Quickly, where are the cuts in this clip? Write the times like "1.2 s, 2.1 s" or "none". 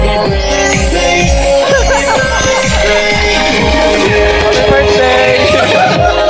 none